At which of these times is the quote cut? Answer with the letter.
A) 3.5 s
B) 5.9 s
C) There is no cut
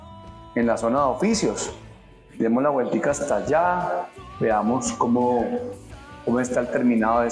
C